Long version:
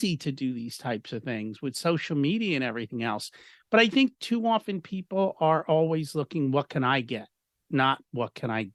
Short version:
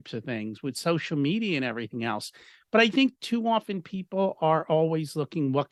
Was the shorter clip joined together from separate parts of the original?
no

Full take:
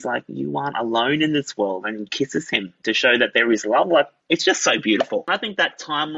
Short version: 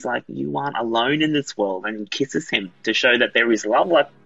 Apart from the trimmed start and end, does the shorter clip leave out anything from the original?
no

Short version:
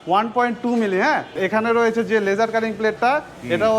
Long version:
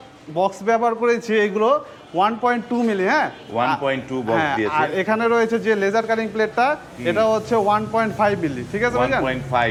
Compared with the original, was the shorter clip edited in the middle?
yes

